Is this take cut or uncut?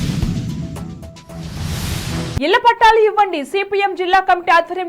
cut